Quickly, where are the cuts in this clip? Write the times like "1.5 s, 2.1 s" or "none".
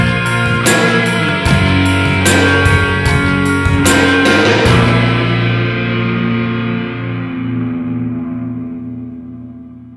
8.7 s